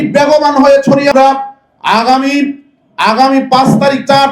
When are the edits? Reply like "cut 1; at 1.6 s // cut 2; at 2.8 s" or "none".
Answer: cut 1; at 1.1 s